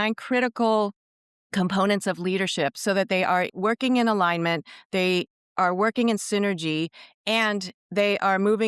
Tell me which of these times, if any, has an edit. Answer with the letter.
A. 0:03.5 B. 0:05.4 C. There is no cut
A